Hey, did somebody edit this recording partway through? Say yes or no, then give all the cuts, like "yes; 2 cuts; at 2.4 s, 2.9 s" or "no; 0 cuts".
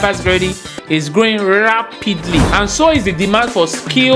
yes; 1 cut; at 2.5 s